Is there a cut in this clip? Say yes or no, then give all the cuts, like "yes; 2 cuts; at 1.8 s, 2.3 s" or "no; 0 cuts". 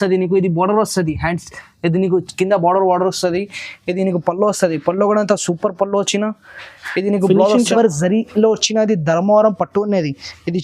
yes; 1 cut; at 7.7 s